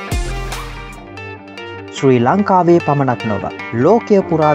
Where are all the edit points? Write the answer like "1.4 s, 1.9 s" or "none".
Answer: 1.0 s

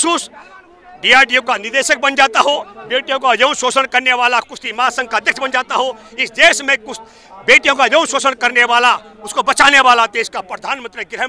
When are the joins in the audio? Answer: none

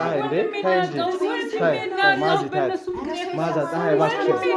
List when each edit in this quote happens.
none

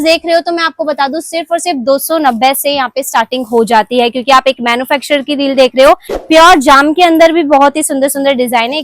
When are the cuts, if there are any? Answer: 6.1 s

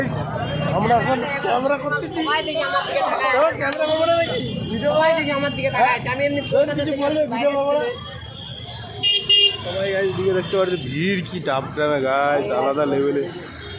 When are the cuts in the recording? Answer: none

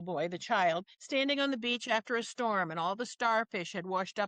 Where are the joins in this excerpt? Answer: 0.9 s

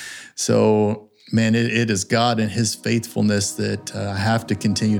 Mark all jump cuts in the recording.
none

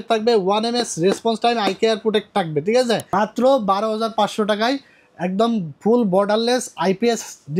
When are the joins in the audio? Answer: 3.1 s

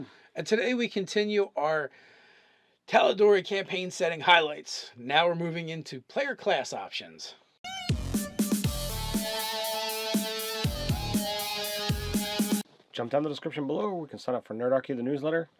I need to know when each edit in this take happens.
none

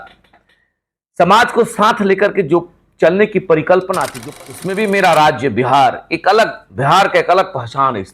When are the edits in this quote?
4.2 s

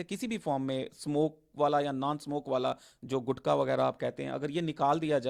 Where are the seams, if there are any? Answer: none

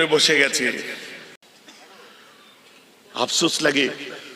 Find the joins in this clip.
1.4 s

